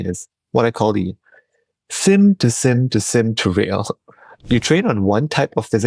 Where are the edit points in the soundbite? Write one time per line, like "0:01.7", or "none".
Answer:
0:04.5